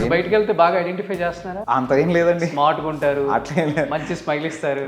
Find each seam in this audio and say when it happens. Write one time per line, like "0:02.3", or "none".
0:01.5

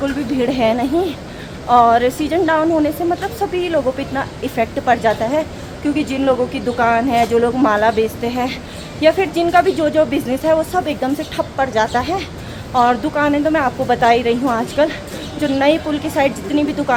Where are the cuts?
none

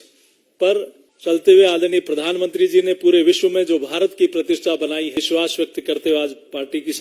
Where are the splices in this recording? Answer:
0:01.0
0:05.2

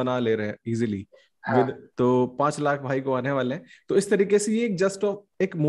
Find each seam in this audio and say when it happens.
0:01.8

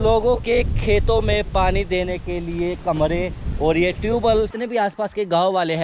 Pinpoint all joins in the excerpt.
0:04.5

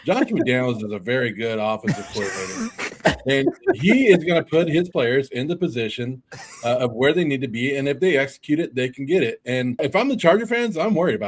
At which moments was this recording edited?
none

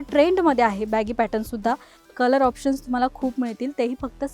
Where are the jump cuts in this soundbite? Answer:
0:01.9

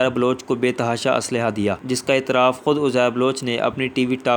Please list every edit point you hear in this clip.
none

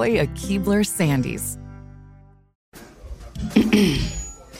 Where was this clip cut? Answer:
0:02.6

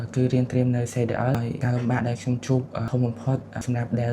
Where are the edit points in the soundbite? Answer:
0:01.1

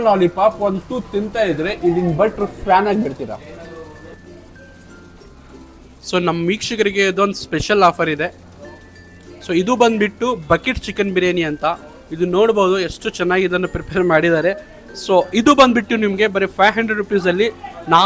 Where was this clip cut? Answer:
0:04.2

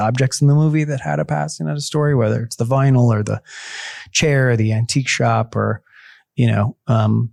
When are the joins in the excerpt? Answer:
none

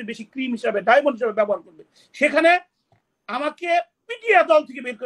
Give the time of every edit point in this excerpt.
none

